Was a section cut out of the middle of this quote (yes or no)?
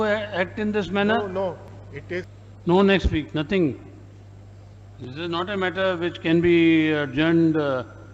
yes